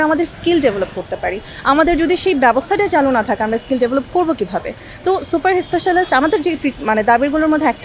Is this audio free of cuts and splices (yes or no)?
yes